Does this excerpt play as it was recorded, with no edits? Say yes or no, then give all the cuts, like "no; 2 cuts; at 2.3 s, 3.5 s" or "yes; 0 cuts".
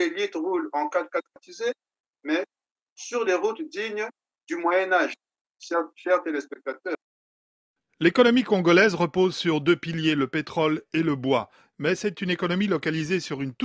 no; 2 cuts; at 1.4 s, 6.9 s